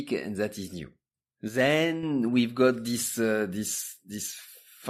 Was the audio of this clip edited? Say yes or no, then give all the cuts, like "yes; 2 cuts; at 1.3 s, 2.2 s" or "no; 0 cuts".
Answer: no; 0 cuts